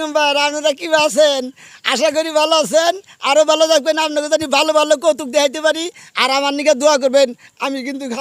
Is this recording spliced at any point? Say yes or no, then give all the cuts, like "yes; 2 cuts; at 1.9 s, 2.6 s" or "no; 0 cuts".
no; 0 cuts